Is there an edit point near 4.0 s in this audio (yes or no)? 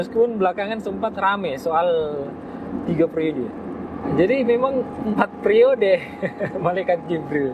yes